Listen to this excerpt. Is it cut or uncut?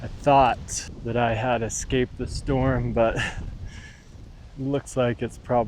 cut